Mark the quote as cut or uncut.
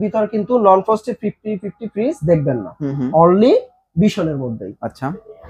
uncut